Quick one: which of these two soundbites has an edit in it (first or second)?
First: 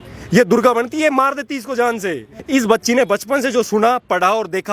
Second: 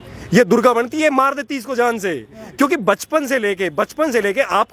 first